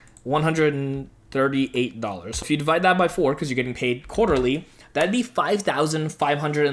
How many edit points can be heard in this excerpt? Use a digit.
1